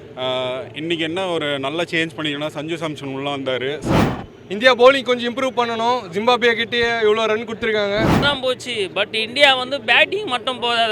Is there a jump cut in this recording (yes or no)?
yes